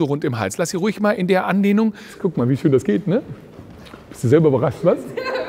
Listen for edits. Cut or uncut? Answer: cut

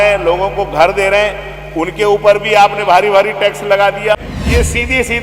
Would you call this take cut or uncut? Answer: cut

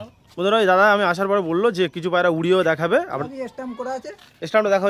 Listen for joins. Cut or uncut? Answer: cut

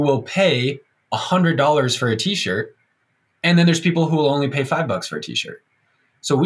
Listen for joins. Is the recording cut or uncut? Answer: uncut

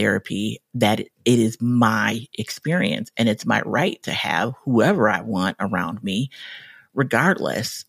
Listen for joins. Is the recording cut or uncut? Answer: uncut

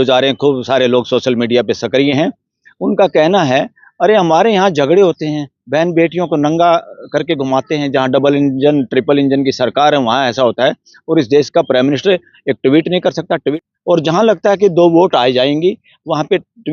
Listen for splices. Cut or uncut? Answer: cut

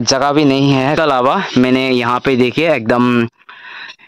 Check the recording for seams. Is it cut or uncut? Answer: cut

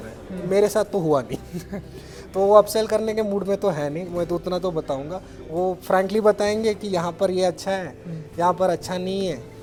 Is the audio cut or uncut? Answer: uncut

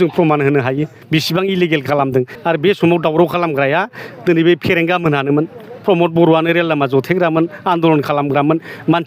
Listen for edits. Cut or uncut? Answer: cut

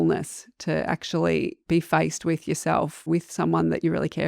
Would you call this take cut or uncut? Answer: cut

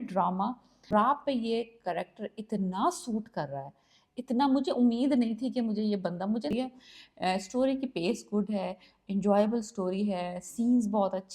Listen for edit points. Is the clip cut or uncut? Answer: cut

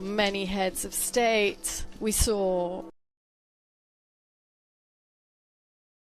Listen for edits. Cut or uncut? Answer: uncut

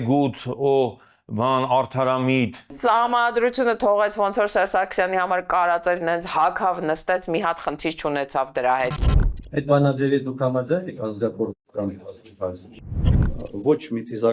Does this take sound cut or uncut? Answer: cut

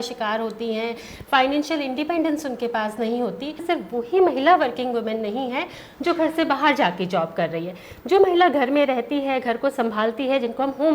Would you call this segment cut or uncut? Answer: cut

